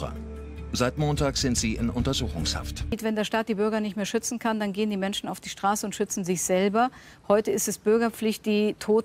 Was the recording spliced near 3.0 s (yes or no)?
yes